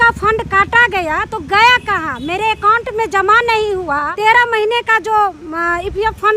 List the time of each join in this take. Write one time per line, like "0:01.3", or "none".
0:04.1